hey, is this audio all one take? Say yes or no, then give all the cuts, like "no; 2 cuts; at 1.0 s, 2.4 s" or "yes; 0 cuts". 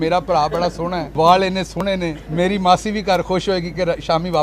no; 2 cuts; at 1.0 s, 2.2 s